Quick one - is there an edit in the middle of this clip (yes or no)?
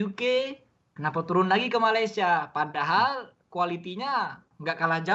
no